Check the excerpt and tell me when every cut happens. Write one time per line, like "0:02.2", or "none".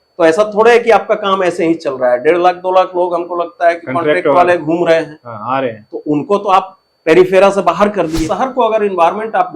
0:08.3